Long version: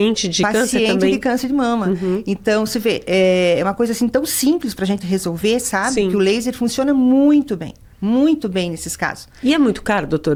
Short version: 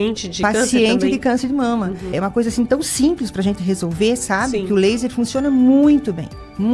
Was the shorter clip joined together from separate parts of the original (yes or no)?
yes